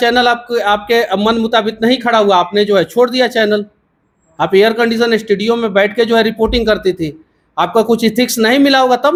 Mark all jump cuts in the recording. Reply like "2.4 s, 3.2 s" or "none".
none

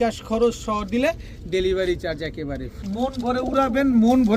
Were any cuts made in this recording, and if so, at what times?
2.8 s

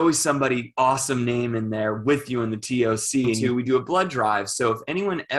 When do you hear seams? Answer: 3.4 s

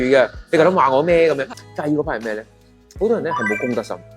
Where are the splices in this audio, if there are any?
1.5 s

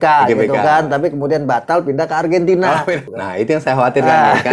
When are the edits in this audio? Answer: 3.0 s

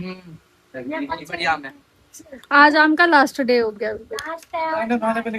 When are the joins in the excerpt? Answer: none

